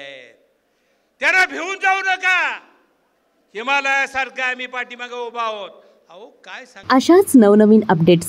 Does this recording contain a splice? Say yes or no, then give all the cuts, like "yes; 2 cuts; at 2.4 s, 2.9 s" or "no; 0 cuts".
yes; 1 cut; at 6.7 s